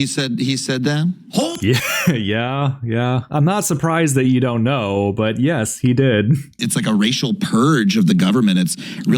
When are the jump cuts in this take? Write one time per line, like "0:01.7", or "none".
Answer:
0:06.6